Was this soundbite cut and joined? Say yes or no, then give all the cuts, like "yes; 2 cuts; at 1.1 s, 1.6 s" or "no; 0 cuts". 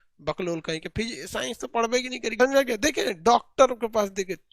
yes; 1 cut; at 2.4 s